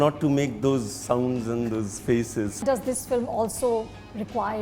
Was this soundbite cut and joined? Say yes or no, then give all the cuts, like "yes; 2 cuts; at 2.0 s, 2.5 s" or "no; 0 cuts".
yes; 1 cut; at 2.6 s